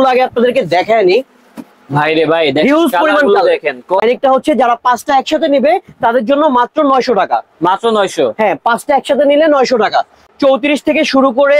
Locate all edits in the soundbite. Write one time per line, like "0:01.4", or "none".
0:04.0
0:10.2